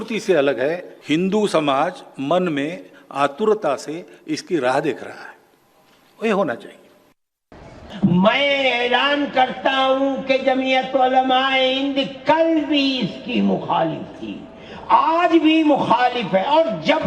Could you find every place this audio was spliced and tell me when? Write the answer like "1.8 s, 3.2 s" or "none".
0.9 s, 7.4 s

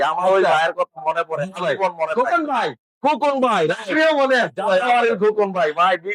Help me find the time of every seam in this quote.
none

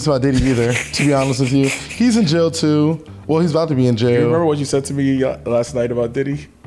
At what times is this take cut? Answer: none

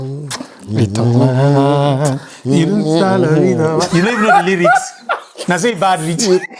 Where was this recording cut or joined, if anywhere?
none

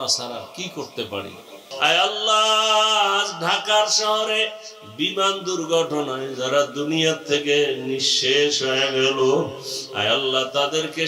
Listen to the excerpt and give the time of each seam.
1.6 s

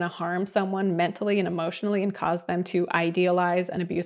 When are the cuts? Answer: none

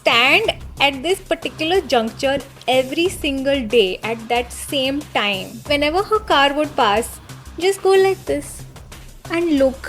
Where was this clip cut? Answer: 5.7 s

